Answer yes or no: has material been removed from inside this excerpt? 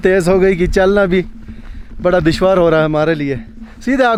no